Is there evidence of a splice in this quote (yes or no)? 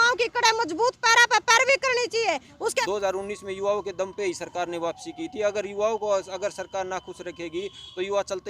yes